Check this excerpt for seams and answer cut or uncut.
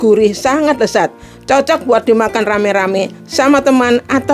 uncut